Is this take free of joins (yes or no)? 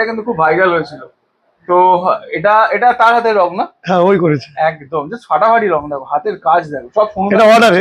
yes